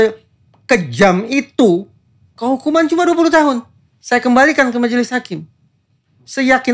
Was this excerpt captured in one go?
yes; 0 cuts

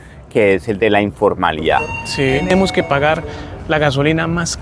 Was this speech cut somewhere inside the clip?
yes; 1 cut; at 2.4 s

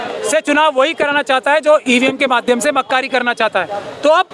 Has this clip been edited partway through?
no; 0 cuts

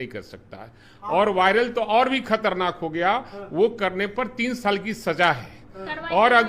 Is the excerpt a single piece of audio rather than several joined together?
yes; 0 cuts

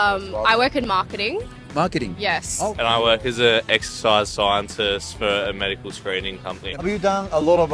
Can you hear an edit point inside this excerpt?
yes; 2 cuts; at 2.8 s, 6.8 s

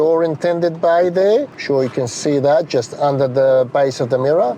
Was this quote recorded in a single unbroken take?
no; 1 cut; at 1.6 s

